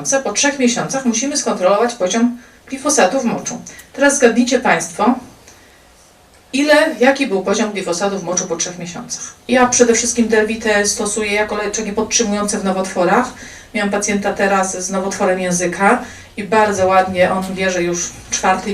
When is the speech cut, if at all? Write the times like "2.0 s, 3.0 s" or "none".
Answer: 9.5 s

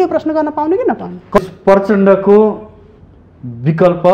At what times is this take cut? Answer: 1.4 s

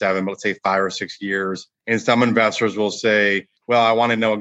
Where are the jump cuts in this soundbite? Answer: 1.7 s, 3.5 s

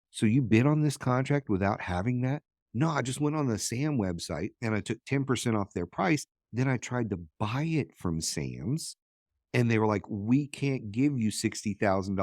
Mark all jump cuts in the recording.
4.6 s

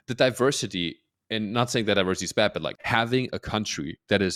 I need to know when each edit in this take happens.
2.8 s

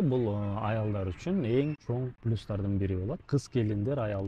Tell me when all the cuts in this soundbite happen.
3.2 s

